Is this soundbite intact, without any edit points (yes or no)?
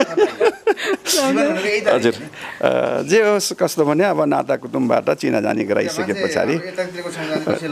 yes